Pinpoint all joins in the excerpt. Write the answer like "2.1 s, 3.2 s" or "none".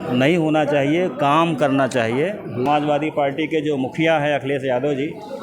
2.6 s